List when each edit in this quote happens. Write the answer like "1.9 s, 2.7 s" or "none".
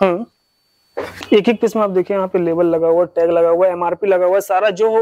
1.2 s